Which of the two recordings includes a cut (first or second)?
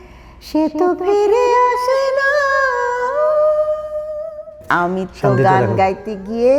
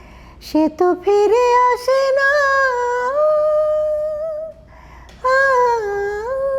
first